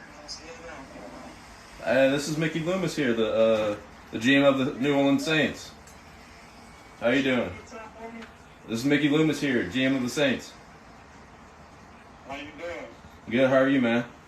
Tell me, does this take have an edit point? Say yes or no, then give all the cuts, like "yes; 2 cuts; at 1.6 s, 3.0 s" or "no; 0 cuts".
no; 0 cuts